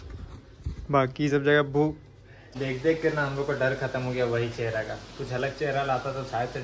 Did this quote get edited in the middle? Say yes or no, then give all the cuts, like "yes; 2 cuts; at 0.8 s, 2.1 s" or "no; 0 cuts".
yes; 1 cut; at 2.5 s